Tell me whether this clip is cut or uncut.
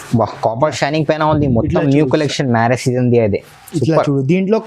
uncut